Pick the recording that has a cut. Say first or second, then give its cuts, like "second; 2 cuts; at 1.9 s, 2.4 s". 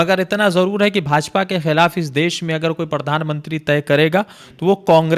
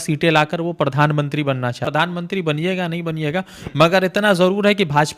second; 1 cut; at 1.8 s